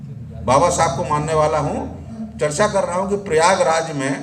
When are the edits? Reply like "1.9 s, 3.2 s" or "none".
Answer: 2.2 s